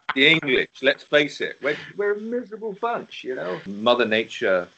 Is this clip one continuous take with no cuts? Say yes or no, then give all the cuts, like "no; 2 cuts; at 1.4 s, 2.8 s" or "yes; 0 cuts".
no; 1 cut; at 3.7 s